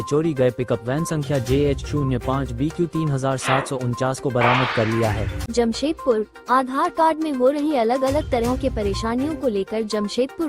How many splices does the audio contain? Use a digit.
1